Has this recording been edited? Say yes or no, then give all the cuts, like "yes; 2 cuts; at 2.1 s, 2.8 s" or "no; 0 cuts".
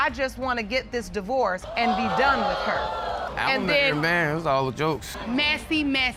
no; 0 cuts